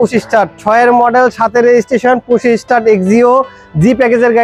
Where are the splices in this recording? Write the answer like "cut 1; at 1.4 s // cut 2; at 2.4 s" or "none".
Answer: none